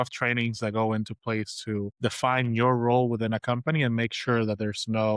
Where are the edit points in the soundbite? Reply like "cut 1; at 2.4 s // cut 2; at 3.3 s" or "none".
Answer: cut 1; at 1.9 s

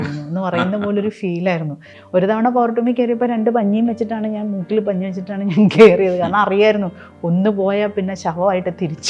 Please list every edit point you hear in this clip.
cut 1; at 2.0 s

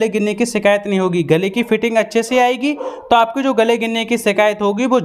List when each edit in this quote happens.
none

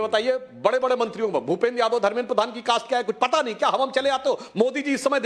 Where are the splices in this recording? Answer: none

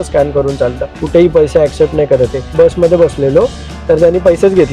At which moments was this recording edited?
cut 1; at 0.9 s // cut 2; at 2.5 s

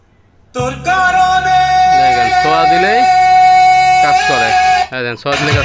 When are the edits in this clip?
none

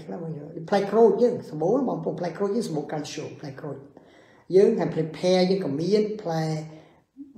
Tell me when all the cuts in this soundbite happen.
none

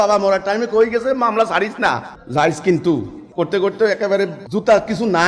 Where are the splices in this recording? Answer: cut 1; at 2.1 s // cut 2; at 3.2 s

